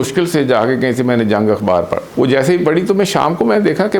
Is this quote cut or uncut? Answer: cut